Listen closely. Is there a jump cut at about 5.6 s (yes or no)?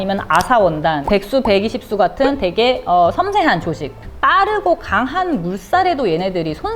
no